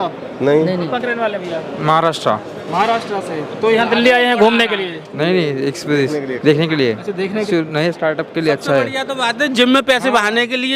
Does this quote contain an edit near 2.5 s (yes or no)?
no